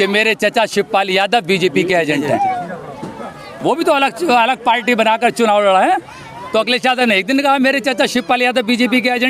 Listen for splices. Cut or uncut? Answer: uncut